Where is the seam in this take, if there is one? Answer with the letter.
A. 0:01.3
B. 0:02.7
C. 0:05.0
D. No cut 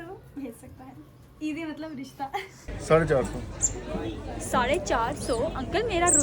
B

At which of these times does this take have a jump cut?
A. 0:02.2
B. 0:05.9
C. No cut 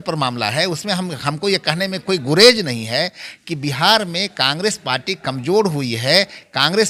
C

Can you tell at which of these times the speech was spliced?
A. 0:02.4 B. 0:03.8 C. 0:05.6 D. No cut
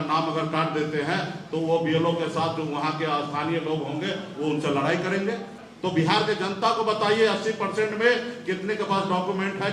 C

